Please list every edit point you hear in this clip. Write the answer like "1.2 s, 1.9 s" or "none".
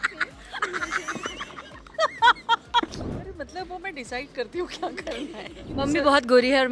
3.2 s, 5.8 s